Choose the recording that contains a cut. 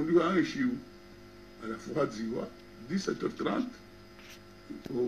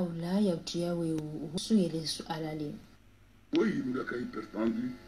second; 1 cut; at 1.6 s

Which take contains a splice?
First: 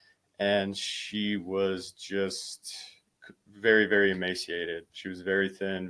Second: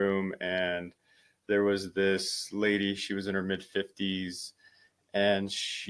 first; 1 cut; at 4.9 s

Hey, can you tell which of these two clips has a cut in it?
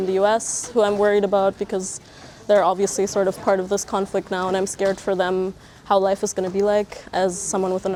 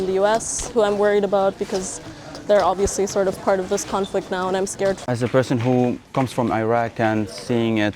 second; 1 cut; at 5.0 s

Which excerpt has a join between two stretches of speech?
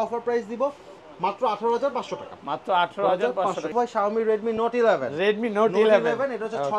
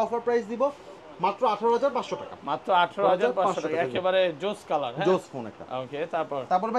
first; 1 cut; at 3.7 s

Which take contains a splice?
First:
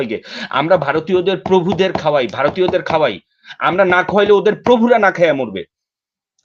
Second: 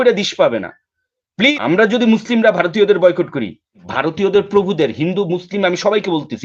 second; 2 cuts; at 1.5 s, 3.9 s

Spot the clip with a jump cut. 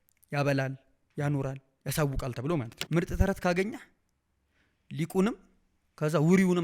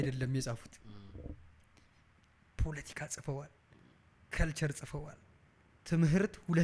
first; 1 cut; at 2.8 s

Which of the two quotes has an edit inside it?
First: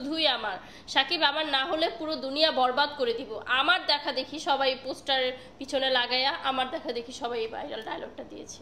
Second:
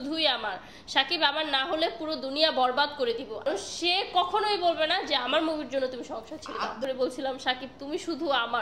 second; 2 cuts; at 3.4 s, 6.8 s

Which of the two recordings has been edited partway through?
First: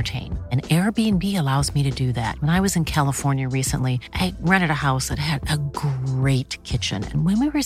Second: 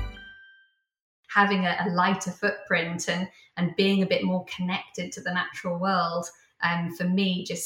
second; 1 cut; at 1.2 s

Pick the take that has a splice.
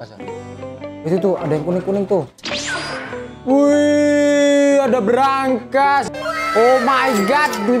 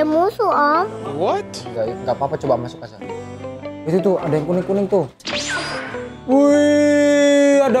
first; 1 cut; at 6.1 s

